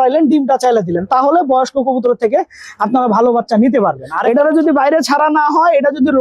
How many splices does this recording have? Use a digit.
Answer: 1